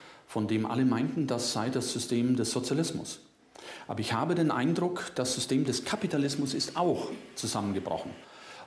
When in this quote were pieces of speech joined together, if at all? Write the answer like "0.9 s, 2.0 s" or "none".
2.1 s